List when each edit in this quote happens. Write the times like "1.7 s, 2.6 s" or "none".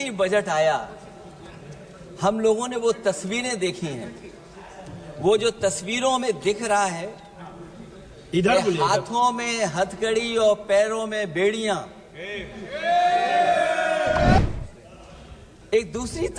14.4 s